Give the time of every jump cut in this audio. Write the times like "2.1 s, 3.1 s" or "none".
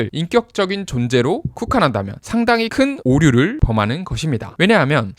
2.2 s